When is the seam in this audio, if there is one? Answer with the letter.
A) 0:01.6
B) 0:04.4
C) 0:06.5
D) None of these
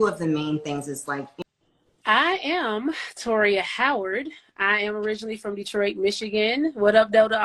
A